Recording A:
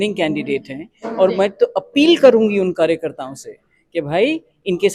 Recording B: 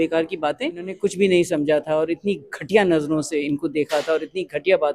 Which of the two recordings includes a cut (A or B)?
B